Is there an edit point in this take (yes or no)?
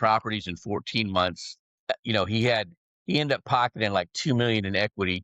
yes